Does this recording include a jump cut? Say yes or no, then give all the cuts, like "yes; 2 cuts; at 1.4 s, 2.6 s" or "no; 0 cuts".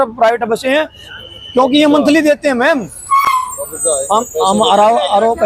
no; 0 cuts